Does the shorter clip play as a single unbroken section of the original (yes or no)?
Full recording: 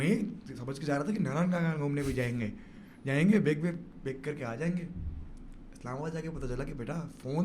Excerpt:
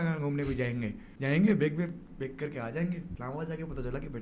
no